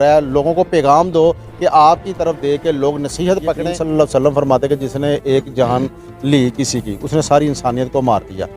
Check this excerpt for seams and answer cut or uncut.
cut